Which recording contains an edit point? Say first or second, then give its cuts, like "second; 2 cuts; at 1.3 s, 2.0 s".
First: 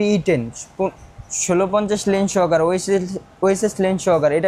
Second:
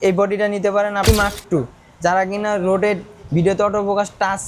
second; 1 cut; at 1.1 s